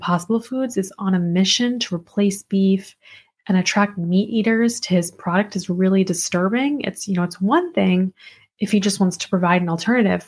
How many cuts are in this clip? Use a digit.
0